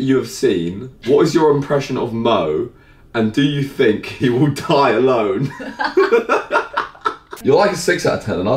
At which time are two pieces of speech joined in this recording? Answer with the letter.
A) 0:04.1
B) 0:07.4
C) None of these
B